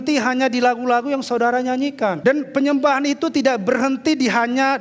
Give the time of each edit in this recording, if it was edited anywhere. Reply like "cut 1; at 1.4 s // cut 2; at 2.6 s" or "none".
cut 1; at 2.2 s